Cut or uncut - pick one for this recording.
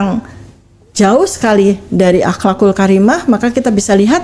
uncut